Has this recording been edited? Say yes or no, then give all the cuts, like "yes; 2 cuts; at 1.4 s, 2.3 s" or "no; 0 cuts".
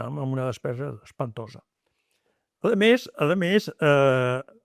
no; 0 cuts